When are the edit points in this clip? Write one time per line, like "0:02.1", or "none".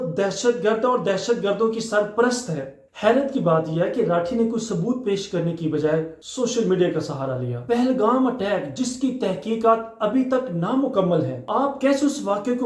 none